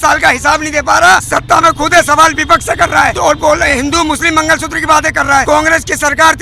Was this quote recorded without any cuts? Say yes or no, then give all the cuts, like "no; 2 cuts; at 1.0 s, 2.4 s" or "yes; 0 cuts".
no; 3 cuts; at 1.3 s, 3.1 s, 5.4 s